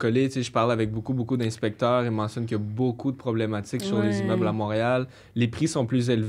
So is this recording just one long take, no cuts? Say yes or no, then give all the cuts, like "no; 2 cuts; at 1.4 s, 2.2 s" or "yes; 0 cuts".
yes; 0 cuts